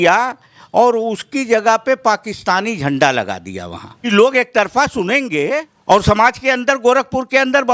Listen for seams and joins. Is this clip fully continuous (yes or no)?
no